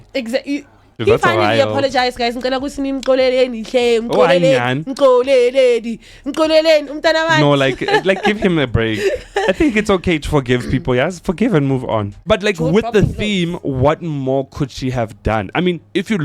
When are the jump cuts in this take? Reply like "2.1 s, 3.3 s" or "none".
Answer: 0.9 s, 12.2 s